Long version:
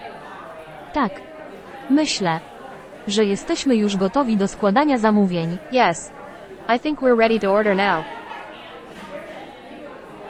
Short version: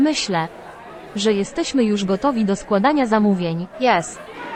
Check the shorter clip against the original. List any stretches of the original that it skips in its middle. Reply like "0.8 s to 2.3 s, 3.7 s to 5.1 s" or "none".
none

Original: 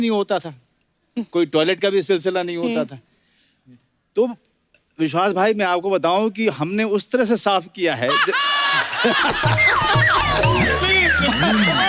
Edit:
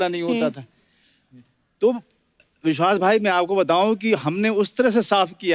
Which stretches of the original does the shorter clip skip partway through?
none

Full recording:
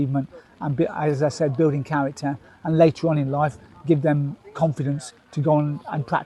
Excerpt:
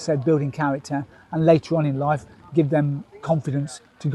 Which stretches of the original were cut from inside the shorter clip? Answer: none

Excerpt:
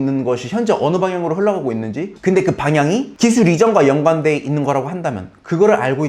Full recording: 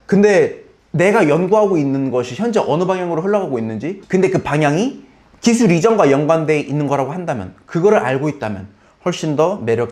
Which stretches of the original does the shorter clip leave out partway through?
5.0 s to 5.3 s

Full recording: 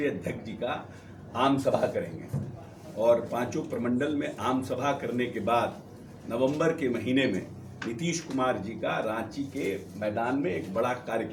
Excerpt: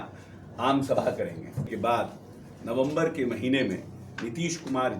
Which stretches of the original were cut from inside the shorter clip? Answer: 2.5 s to 5.4 s

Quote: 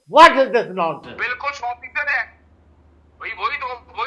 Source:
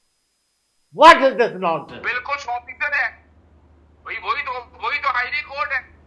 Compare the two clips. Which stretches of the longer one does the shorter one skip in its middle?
none

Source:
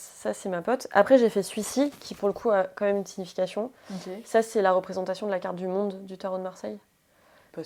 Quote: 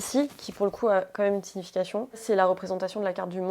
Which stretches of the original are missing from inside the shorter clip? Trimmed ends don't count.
3.8 s to 4.5 s

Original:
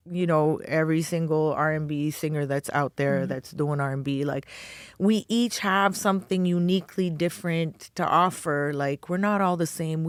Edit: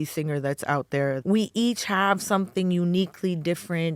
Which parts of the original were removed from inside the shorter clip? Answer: 3.2 s to 4.9 s

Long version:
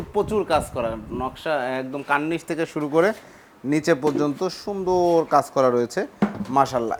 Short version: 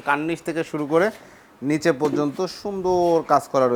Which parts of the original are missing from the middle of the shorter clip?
none

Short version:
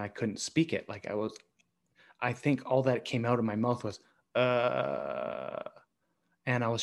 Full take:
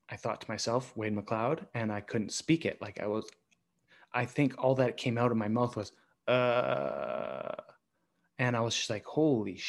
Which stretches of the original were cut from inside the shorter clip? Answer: none

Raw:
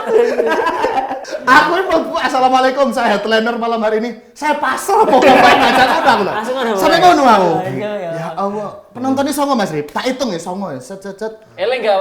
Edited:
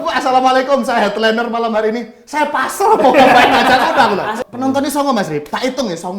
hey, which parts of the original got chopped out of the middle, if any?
6.5 s to 8.8 s

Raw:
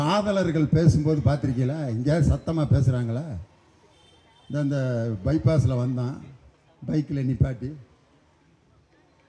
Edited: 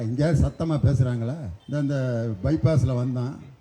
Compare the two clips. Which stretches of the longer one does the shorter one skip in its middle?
3.4 s to 4.3 s

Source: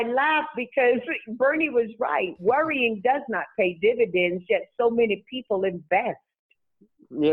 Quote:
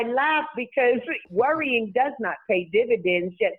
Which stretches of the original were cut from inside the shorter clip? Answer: 1.2 s to 2.3 s

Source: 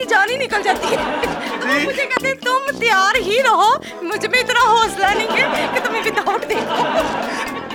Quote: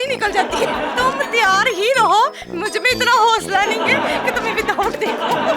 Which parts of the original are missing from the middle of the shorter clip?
1.2 s to 2.4 s

